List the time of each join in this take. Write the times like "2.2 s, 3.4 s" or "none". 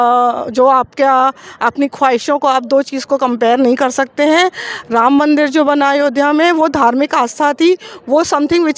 none